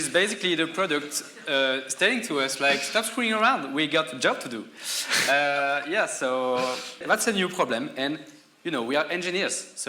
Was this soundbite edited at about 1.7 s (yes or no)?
no